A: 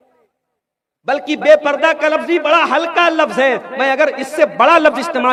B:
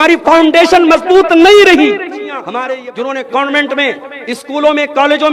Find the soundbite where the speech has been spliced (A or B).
B